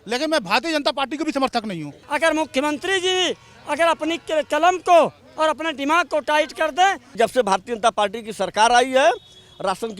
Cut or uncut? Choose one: cut